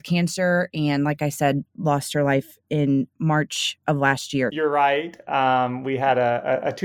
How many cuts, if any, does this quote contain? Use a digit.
1